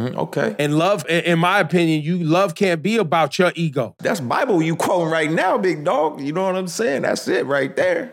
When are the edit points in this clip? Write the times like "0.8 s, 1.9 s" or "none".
1.0 s, 4.0 s